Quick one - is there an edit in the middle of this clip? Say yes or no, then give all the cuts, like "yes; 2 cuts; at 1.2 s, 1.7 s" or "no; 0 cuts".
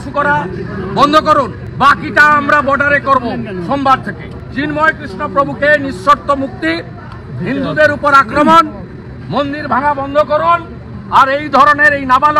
yes; 2 cuts; at 1.6 s, 4.3 s